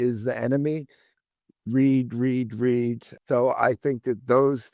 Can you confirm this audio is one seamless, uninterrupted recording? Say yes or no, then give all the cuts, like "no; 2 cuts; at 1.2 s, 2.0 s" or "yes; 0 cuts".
no; 2 cuts; at 1.1 s, 3.1 s